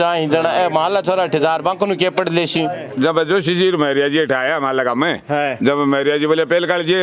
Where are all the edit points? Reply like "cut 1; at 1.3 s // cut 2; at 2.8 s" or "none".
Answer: cut 1; at 2.8 s